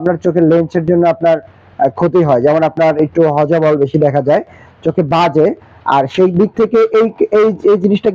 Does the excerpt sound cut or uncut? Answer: uncut